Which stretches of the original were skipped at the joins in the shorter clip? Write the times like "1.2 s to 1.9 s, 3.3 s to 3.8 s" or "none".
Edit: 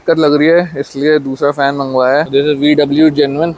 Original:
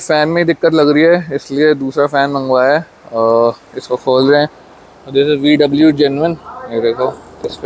2.8 s to 5.1 s